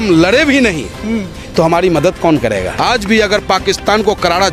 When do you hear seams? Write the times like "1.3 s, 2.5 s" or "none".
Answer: 3.0 s